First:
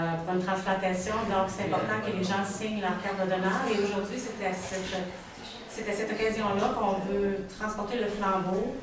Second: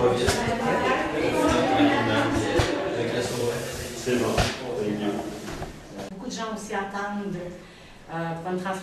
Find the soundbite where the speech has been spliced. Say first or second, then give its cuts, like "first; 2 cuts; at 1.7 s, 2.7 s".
second; 1 cut; at 6.1 s